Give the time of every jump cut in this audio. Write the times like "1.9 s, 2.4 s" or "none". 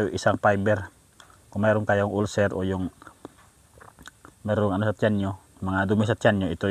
none